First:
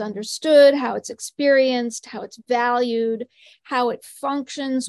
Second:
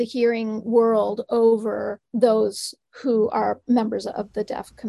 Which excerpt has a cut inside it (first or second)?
second